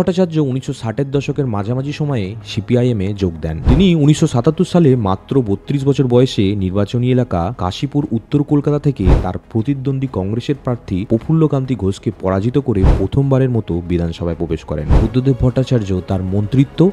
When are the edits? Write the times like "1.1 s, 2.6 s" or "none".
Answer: 3.6 s, 15.0 s